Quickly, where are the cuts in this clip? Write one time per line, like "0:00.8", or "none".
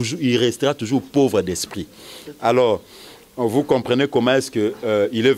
none